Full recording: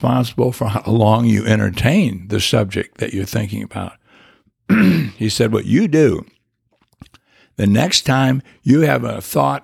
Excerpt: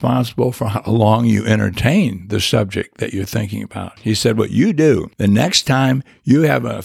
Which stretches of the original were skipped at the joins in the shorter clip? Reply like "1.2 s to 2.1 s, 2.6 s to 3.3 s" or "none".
4.0 s to 5.1 s, 6.2 s to 7.5 s